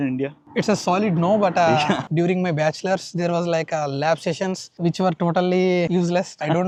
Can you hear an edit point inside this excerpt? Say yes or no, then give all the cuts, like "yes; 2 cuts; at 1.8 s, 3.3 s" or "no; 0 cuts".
no; 0 cuts